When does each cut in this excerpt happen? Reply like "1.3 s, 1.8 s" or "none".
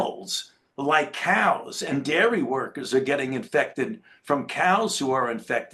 none